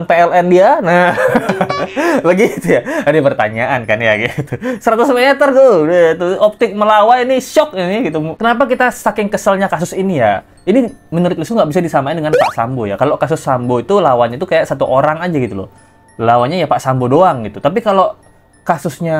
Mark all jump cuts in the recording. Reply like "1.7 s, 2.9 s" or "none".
none